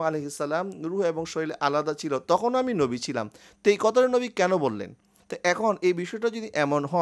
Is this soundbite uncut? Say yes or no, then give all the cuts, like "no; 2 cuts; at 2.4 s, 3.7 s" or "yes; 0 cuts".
yes; 0 cuts